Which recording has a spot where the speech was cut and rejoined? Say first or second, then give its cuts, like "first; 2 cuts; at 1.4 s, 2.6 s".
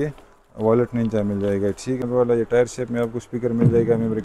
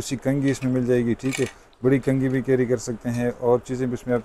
first; 1 cut; at 2.1 s